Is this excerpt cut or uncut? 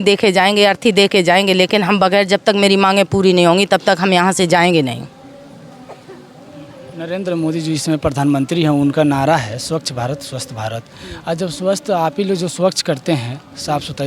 uncut